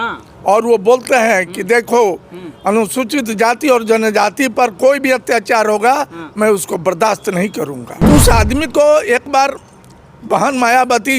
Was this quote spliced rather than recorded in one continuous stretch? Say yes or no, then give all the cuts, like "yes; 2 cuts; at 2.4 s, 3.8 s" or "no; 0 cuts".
yes; 1 cut; at 7.9 s